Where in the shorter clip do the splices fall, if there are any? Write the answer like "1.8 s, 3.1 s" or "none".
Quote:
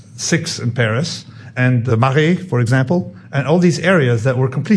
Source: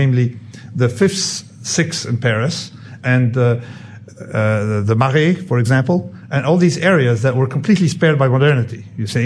1.6 s